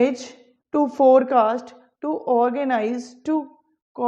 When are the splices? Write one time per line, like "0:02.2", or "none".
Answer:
none